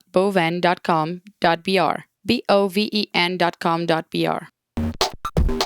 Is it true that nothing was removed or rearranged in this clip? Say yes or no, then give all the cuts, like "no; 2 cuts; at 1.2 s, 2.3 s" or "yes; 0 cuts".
no; 2 cuts; at 2.1 s, 4.5 s